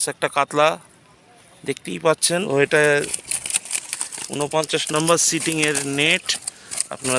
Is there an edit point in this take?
yes; 1 cut; at 2.5 s

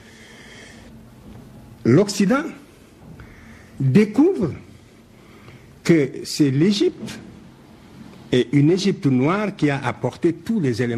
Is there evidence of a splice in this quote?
no; 0 cuts

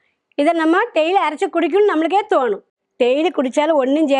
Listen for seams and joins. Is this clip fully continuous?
no; 1 cut; at 2.7 s

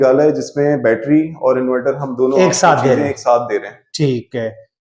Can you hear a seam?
no; 0 cuts

